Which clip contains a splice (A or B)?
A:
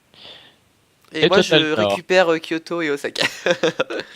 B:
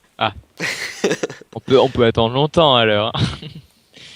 A